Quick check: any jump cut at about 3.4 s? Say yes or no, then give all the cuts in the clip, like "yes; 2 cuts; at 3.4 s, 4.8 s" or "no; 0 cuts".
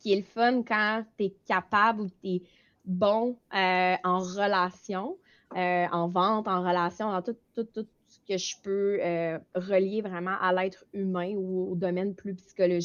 no; 0 cuts